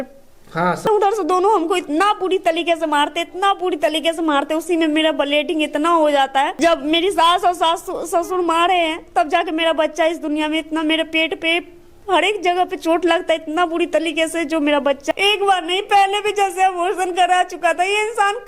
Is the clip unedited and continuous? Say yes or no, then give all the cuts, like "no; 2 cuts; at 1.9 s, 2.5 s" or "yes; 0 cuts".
no; 3 cuts; at 0.9 s, 6.5 s, 15.1 s